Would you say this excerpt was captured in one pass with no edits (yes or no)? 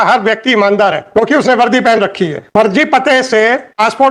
yes